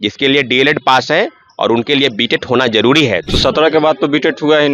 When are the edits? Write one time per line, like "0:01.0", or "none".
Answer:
0:03.2